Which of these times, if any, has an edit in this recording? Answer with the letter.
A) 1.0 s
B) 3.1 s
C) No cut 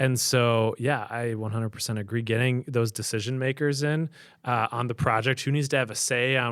C